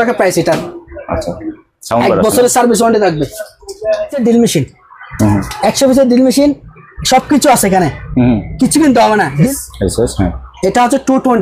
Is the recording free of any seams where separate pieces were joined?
no; 2 cuts; at 4.2 s, 9.5 s

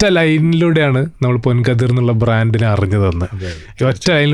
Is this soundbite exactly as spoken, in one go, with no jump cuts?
yes; 0 cuts

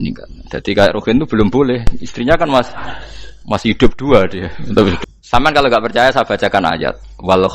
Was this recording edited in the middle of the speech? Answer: yes; 1 cut; at 5.0 s

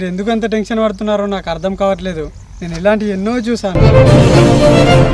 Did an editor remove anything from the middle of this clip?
no; 0 cuts

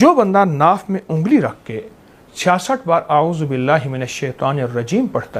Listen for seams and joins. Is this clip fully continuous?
yes; 0 cuts

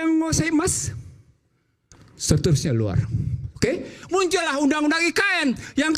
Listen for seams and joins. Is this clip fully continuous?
no; 1 cut; at 4.0 s

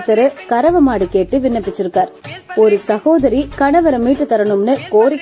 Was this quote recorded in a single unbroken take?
yes; 0 cuts

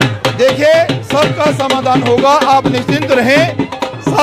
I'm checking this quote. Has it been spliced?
no; 0 cuts

